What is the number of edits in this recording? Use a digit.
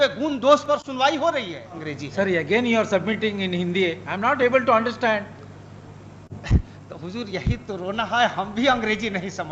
1